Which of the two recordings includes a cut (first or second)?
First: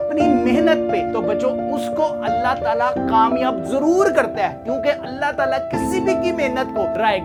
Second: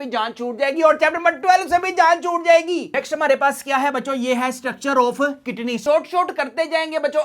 second